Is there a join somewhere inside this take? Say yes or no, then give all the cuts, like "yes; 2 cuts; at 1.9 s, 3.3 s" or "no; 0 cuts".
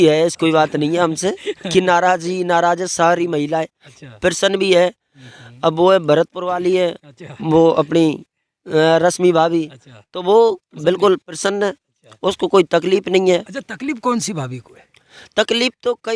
no; 0 cuts